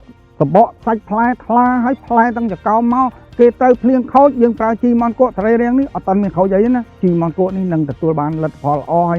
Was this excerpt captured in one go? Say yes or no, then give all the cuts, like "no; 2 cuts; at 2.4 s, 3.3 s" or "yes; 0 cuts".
no; 1 cut; at 6.9 s